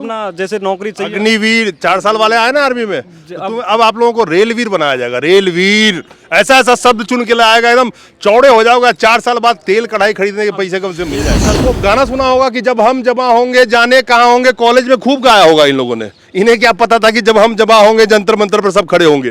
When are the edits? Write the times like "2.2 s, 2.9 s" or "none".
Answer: 11.5 s